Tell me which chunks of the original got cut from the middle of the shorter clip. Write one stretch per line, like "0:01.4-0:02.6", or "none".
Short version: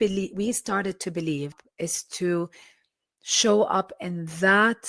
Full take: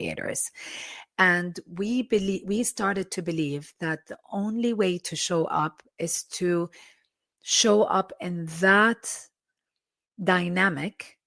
0:03.7-0:05.8